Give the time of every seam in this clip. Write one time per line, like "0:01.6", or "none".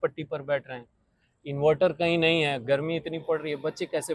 none